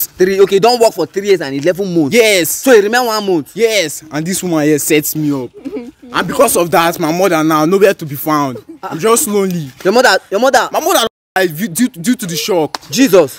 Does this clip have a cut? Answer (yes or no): no